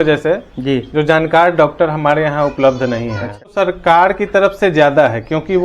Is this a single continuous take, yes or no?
no